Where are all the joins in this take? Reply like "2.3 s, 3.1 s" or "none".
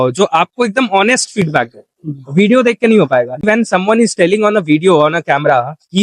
3.4 s